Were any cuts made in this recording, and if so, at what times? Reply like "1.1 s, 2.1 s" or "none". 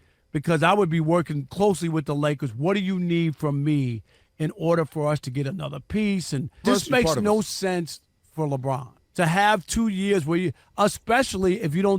6.6 s, 9.0 s

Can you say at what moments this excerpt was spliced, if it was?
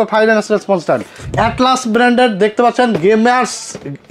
1.3 s

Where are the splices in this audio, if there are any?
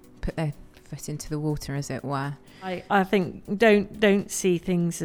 2.8 s

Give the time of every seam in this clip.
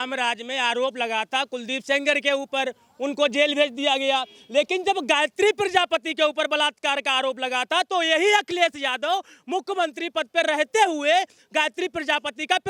none

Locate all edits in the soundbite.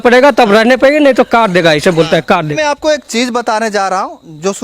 2.5 s

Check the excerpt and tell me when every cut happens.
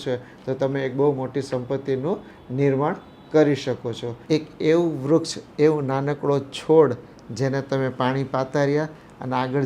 4.1 s

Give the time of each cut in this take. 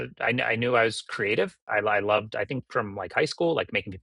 1.6 s

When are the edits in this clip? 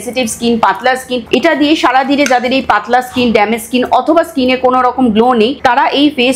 1.3 s

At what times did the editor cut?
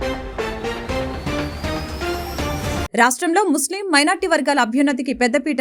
2.9 s

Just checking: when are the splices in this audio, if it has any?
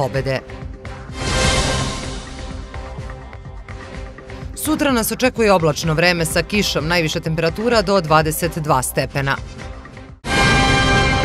10.3 s

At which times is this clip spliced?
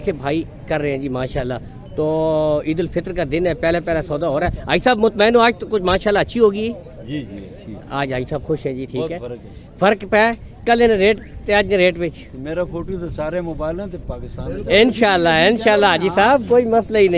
none

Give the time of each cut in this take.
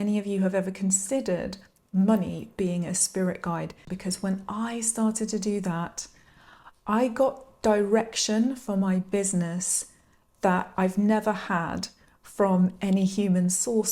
3.9 s

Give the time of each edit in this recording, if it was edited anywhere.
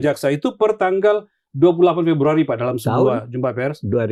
none

